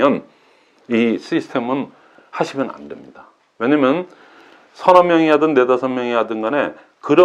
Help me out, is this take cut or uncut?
uncut